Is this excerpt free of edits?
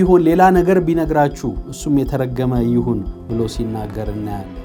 yes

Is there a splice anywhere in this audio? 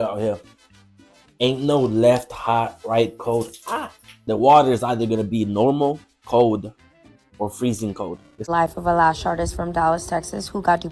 yes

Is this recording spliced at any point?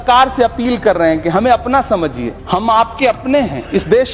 yes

